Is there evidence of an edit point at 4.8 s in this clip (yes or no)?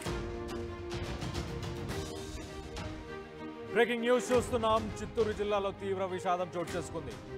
no